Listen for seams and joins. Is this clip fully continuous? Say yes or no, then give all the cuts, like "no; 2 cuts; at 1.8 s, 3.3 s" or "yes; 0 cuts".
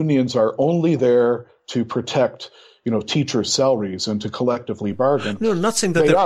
yes; 0 cuts